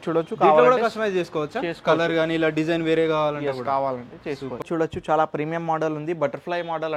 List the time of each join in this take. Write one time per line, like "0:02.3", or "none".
0:04.6